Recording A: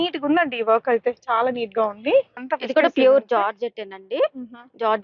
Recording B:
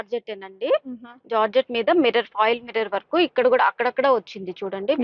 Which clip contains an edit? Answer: A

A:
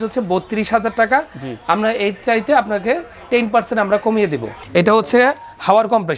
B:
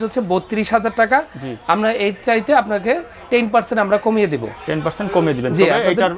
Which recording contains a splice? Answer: A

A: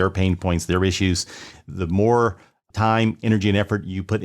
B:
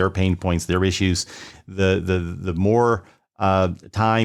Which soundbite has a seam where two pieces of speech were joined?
A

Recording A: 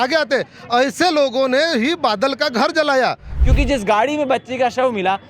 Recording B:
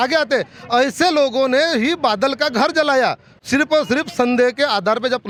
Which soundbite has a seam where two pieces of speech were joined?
A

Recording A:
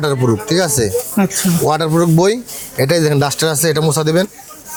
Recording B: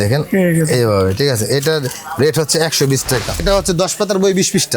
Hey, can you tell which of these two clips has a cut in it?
B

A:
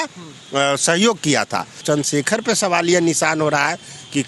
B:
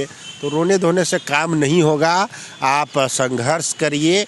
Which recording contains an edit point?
A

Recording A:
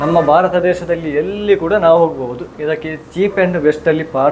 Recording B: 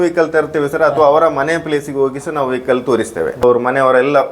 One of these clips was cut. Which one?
B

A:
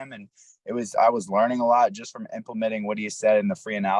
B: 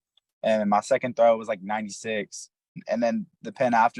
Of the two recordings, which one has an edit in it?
B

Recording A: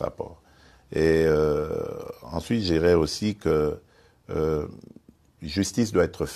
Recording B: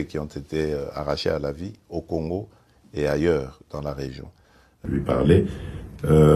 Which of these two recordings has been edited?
B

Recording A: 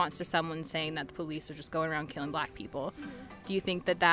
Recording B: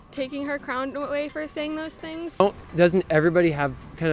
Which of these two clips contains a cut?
B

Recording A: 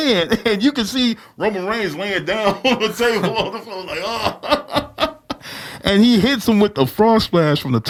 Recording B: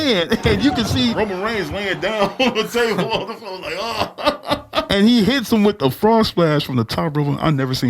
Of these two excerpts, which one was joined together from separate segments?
B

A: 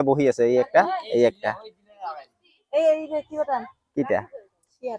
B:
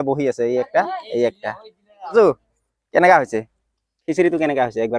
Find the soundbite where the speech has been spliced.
B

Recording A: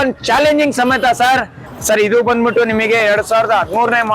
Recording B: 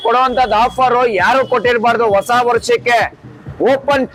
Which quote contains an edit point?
A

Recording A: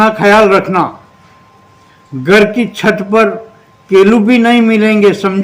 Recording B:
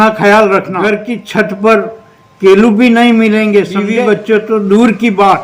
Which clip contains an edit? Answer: B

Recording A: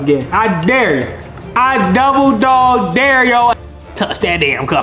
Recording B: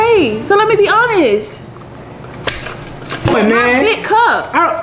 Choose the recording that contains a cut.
B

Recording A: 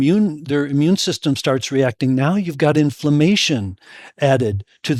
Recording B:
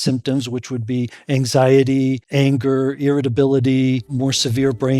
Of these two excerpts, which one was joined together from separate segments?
B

